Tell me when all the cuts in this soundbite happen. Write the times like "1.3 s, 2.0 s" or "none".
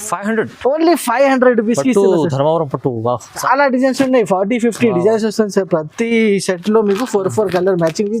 3.3 s